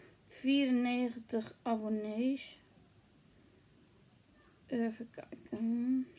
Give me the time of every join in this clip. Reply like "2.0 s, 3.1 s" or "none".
none